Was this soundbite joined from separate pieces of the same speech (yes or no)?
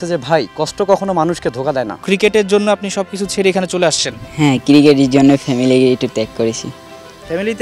yes